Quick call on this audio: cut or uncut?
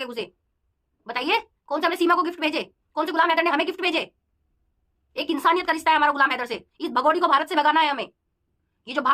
uncut